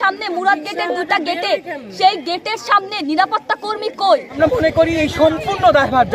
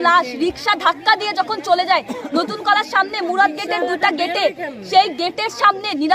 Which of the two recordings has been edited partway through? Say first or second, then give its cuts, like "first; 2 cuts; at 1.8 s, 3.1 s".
first; 1 cut; at 4.4 s